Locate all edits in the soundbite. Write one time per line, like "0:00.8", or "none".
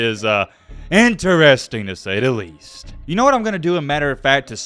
0:02.9